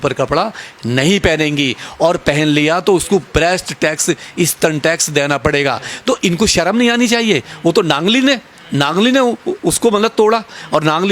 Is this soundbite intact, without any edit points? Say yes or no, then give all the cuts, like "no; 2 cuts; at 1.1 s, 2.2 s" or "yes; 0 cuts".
yes; 0 cuts